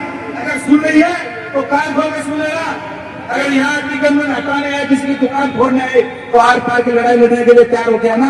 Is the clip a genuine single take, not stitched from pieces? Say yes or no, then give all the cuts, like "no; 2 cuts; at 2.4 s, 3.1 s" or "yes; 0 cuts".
yes; 0 cuts